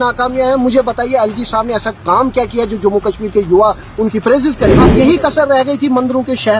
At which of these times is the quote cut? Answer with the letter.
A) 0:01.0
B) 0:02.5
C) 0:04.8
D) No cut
C